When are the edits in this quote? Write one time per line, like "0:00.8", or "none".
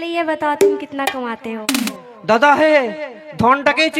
0:01.9

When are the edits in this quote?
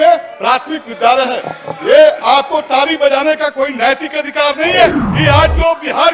0:05.1

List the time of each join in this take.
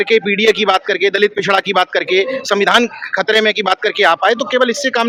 none

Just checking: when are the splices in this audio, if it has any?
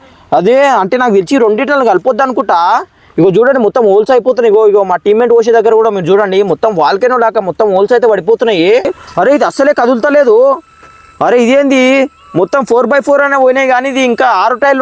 0:09.0

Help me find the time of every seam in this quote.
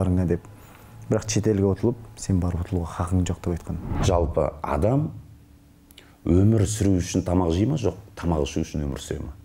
0:04.0

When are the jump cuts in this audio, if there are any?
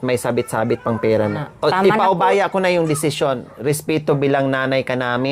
0:01.3

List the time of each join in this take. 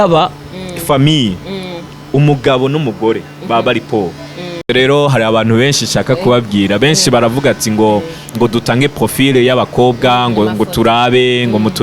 0:04.6

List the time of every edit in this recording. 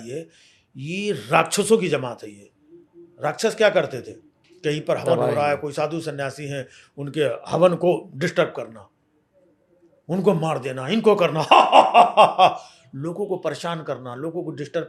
none

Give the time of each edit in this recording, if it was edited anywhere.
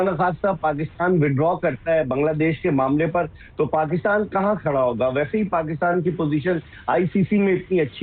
none

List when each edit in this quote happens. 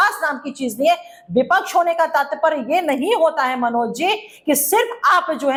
none

